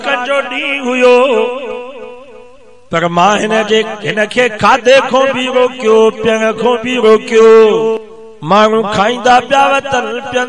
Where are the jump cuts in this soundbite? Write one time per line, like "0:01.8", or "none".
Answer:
0:08.1